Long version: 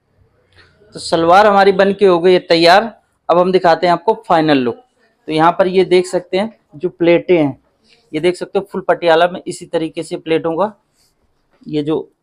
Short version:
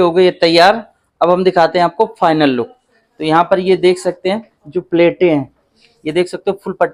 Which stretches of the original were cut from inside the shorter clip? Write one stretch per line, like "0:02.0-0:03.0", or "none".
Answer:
none